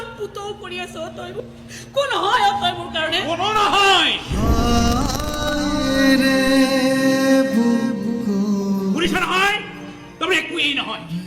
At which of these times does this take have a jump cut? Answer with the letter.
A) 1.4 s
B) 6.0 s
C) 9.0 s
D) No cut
A